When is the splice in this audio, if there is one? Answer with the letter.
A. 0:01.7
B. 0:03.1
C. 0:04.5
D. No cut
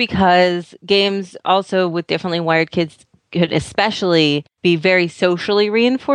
C